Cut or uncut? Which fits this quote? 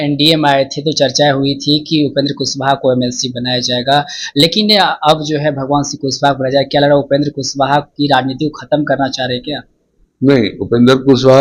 uncut